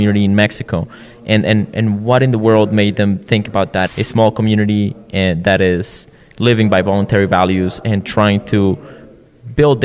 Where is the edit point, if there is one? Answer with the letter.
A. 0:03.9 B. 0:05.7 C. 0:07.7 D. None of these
A